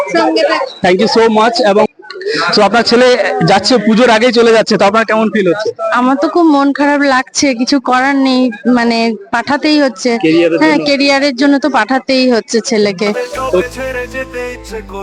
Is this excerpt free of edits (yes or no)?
no